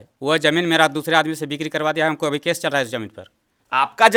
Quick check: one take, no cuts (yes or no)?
yes